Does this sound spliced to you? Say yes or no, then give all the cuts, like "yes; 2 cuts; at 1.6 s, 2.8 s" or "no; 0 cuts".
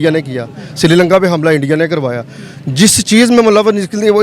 no; 0 cuts